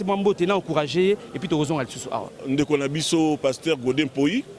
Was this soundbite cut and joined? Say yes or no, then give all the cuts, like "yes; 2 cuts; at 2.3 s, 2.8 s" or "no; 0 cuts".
yes; 1 cut; at 2.3 s